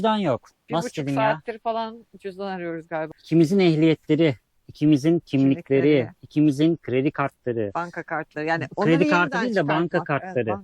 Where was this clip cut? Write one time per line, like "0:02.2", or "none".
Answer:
0:03.1